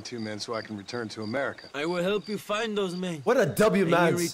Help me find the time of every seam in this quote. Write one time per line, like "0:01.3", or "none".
0:01.6